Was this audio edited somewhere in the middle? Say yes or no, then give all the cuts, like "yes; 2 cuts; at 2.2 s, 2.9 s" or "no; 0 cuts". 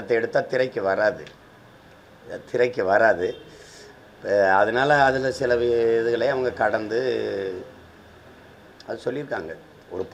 no; 0 cuts